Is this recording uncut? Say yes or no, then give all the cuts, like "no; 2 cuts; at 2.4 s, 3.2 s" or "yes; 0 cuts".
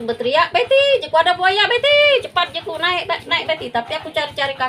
yes; 0 cuts